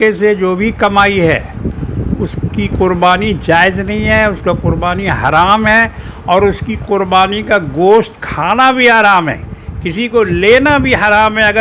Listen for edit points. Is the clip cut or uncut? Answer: uncut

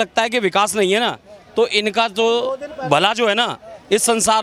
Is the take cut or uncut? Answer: uncut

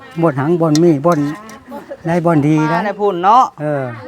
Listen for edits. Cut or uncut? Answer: cut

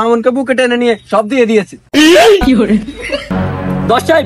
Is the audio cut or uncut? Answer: cut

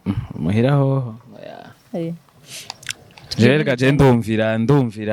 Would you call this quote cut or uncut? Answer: uncut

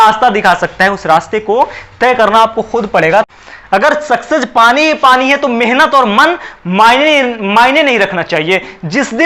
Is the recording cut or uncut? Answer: cut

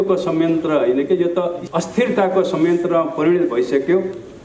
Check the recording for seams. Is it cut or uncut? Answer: cut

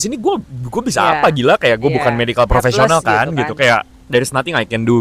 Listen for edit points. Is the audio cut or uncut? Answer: uncut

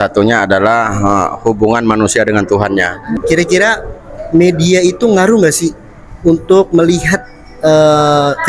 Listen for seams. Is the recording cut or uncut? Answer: cut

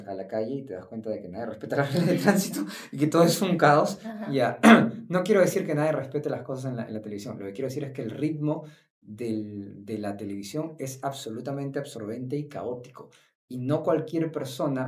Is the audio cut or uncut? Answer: uncut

